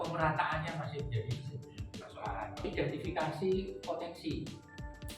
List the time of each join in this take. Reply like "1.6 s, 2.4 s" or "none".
2.6 s